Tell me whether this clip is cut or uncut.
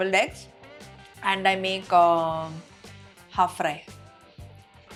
uncut